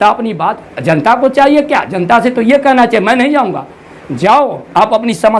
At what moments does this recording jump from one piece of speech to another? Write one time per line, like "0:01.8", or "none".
none